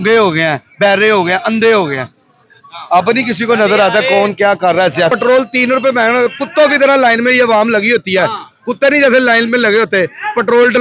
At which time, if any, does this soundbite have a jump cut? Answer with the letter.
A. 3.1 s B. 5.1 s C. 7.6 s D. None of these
B